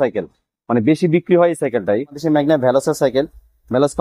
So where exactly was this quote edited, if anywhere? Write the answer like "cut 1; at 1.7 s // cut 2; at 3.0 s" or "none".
cut 1; at 2.2 s